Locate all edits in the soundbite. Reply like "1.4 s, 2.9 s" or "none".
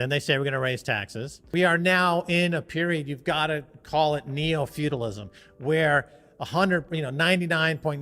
1.4 s